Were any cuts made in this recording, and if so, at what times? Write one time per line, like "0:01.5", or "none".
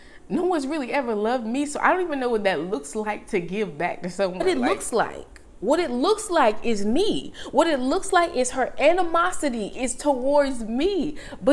0:04.4